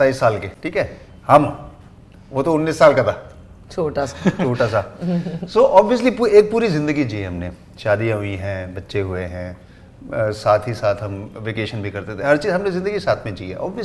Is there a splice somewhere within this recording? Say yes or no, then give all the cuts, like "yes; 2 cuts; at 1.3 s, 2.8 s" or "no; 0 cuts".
no; 0 cuts